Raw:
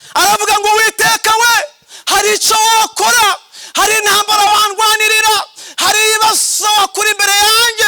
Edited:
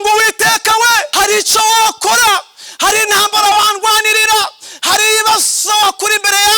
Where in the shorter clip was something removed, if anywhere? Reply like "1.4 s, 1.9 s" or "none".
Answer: 1.1 s